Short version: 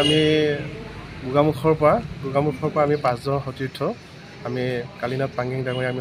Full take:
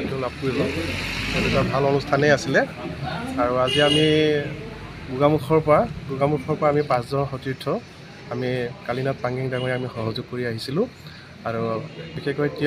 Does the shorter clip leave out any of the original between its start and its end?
no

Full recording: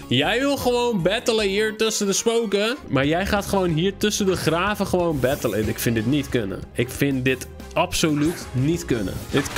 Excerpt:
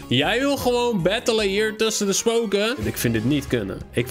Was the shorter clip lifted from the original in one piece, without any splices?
no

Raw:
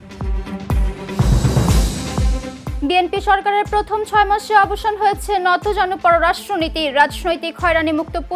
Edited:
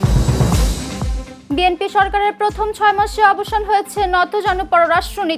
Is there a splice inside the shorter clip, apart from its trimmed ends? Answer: yes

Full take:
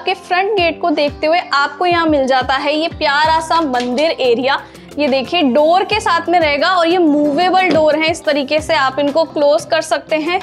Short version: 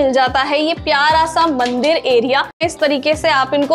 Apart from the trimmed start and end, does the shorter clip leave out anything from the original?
yes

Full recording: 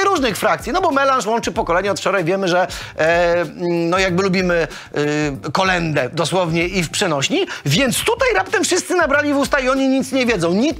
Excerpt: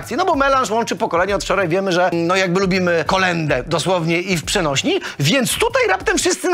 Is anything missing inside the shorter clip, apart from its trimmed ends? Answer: yes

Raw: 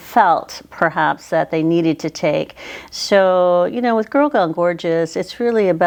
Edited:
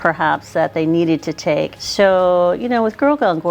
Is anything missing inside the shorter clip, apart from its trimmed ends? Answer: yes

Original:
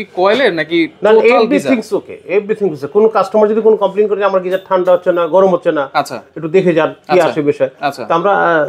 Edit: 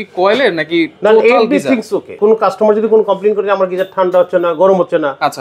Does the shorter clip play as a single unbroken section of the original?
no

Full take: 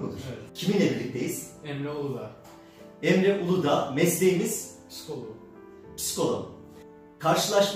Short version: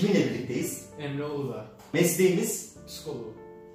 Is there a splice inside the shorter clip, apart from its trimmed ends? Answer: yes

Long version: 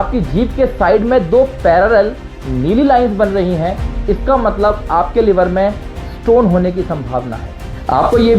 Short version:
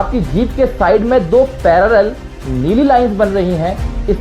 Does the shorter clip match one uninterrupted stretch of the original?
yes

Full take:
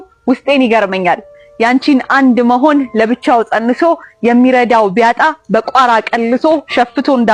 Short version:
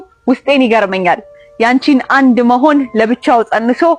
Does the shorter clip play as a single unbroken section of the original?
yes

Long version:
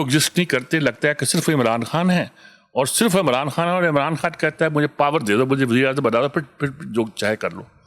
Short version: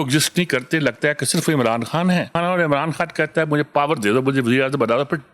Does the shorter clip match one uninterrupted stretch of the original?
no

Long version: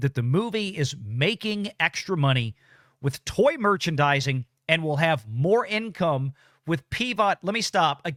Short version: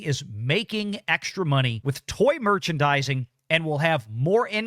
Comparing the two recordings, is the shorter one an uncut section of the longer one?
no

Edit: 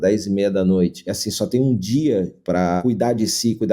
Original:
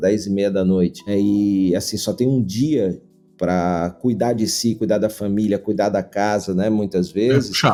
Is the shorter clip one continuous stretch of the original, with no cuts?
no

